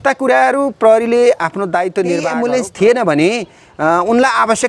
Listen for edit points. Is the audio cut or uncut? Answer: cut